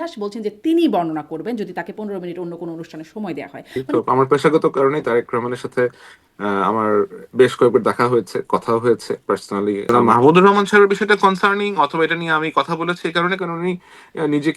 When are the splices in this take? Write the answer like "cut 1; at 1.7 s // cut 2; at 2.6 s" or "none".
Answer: cut 1; at 3.9 s // cut 2; at 9.9 s